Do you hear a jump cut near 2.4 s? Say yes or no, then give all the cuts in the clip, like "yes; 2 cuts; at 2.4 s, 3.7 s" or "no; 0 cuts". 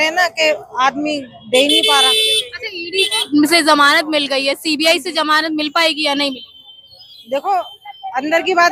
no; 0 cuts